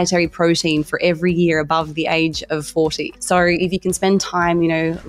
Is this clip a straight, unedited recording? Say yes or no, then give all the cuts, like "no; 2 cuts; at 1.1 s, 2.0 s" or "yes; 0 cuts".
no; 1 cut; at 3.1 s